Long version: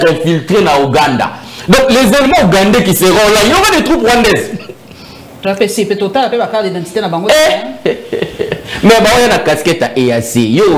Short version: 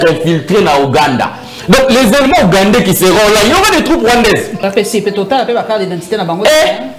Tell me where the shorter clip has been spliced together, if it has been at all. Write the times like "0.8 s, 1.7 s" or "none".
4.5 s